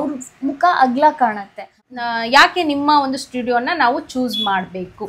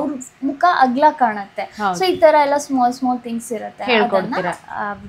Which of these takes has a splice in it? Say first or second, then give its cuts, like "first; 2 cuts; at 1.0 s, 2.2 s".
first; 1 cut; at 1.8 s